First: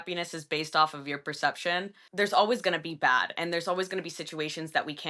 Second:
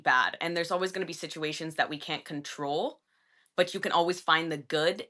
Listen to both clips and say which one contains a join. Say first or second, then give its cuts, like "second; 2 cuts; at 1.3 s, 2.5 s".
first; 1 cut; at 2.0 s